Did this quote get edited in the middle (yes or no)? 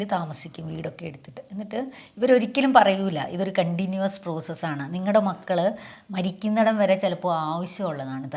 no